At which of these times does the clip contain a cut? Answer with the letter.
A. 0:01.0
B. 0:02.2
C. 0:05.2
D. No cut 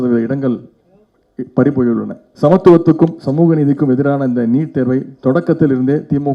B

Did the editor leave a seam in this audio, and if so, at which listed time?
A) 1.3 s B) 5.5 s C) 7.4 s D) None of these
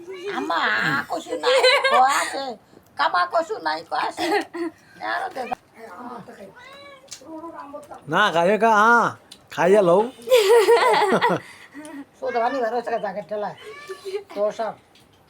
B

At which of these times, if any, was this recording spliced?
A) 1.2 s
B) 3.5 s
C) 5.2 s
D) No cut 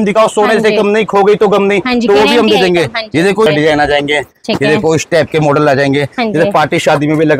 B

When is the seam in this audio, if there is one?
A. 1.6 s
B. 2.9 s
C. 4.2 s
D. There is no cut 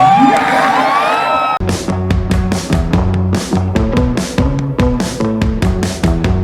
D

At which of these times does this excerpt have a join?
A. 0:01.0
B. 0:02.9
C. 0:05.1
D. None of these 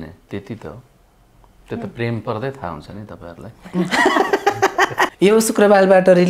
C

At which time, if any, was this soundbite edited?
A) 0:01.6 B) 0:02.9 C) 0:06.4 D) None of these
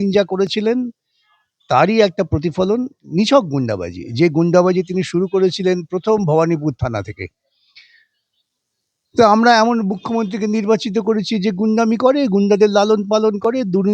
D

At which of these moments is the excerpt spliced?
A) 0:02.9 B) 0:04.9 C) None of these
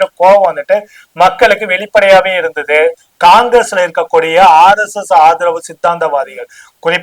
A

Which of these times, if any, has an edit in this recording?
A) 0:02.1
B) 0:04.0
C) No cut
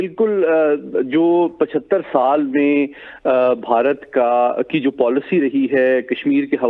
C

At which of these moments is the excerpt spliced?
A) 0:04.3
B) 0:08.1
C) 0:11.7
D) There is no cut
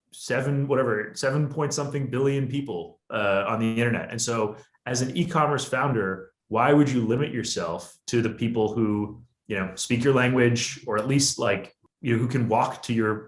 C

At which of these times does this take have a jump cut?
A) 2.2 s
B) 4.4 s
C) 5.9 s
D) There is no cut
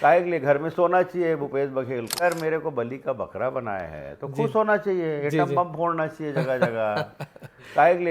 A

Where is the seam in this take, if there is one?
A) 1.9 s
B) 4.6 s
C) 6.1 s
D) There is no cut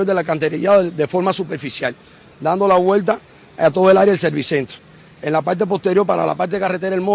D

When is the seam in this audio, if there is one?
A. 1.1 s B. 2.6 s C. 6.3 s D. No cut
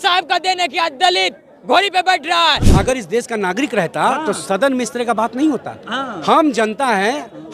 B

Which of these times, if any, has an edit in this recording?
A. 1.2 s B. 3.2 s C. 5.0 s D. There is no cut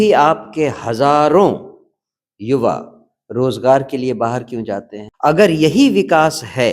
C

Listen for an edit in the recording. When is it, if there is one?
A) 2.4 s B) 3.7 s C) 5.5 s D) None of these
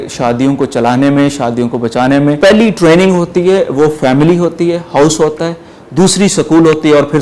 A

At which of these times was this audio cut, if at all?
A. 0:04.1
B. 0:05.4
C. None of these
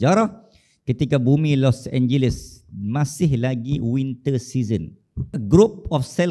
B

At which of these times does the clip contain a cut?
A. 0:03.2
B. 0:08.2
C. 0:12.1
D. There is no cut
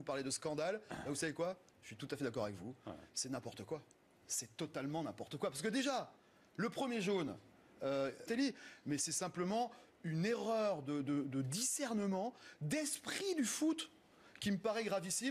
D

